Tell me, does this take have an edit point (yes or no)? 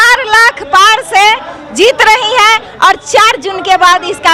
no